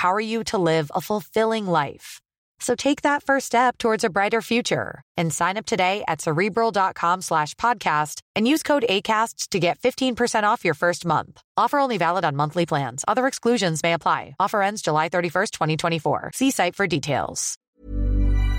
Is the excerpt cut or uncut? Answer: cut